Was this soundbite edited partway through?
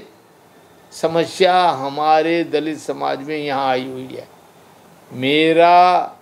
no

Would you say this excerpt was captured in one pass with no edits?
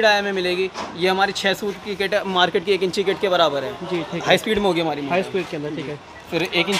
yes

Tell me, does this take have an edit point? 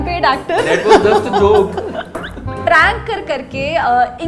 yes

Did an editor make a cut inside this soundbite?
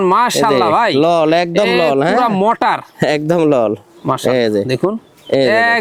no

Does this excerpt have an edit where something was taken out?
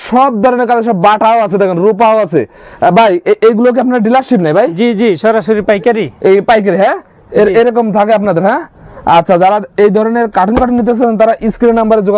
no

